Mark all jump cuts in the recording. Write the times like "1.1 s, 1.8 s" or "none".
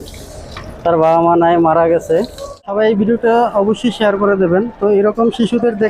2.6 s